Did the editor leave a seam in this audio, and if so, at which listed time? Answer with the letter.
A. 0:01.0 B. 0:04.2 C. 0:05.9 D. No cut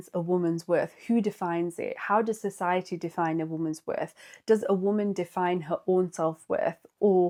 D